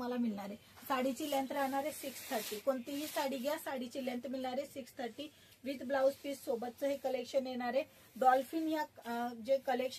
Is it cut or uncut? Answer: uncut